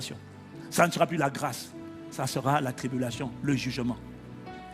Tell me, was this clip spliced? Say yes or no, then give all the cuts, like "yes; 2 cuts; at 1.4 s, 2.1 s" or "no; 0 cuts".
no; 0 cuts